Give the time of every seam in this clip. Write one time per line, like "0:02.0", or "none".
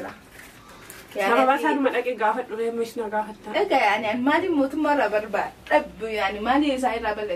none